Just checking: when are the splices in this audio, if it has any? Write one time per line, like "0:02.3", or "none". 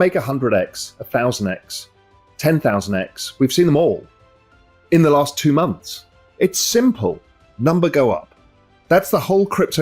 0:06.2